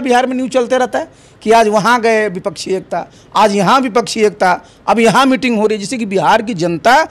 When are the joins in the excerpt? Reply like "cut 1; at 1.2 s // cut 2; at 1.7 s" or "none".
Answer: none

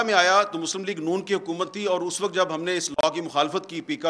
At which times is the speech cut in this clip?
none

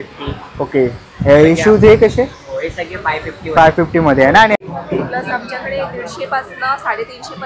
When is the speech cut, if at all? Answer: cut 1; at 4.6 s

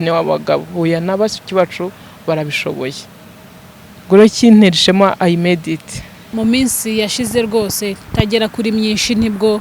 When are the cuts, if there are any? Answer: cut 1; at 6.2 s

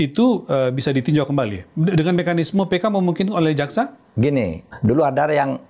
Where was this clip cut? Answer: cut 1; at 4.6 s

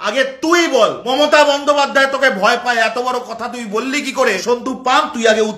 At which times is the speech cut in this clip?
cut 1; at 1.0 s // cut 2; at 4.4 s

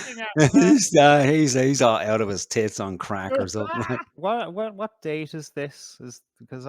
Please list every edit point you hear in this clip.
cut 1; at 4.1 s

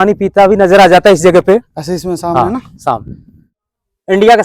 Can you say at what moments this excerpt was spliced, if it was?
cut 1; at 3.5 s

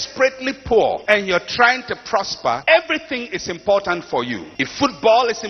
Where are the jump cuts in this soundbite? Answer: cut 1; at 1.0 s // cut 2; at 2.6 s // cut 3; at 4.4 s

